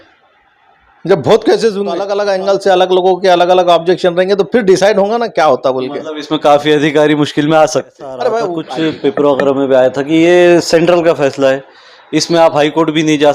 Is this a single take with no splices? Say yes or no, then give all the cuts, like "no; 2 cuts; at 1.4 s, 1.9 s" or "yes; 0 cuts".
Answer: no; 2 cuts; at 2.1 s, 8.6 s